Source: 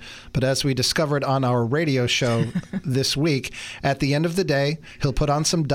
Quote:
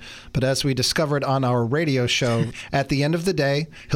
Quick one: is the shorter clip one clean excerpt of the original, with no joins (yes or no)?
no